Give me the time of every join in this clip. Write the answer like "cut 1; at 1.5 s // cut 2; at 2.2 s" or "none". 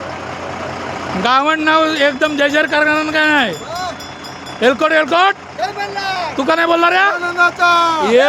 none